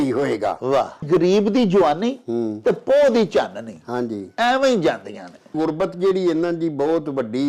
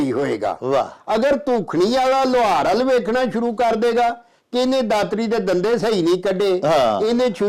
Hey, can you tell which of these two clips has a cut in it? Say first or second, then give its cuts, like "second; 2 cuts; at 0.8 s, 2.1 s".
first; 2 cuts; at 1.0 s, 5.5 s